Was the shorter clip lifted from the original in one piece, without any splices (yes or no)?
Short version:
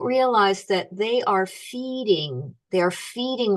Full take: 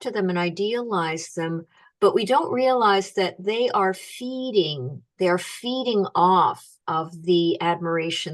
yes